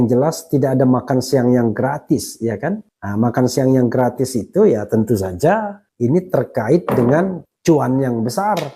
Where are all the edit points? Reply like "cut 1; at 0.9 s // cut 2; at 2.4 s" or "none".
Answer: none